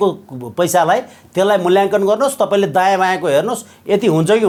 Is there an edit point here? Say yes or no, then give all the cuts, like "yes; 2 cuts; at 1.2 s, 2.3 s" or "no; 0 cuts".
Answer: no; 0 cuts